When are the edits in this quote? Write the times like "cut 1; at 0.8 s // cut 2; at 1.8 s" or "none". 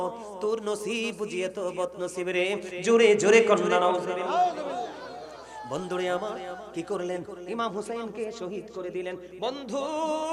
none